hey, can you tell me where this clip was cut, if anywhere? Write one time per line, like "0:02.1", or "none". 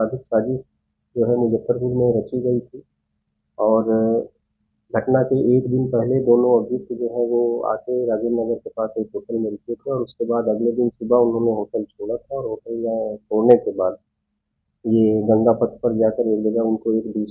none